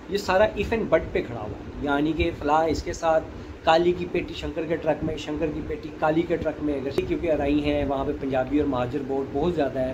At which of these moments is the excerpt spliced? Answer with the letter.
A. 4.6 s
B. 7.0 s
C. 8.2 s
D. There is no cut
B